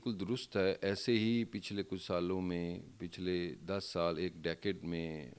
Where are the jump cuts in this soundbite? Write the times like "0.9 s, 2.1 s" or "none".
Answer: none